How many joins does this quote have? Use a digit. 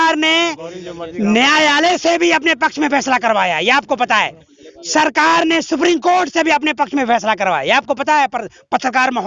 0